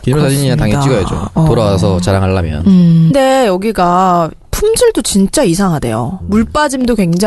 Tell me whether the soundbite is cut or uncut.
uncut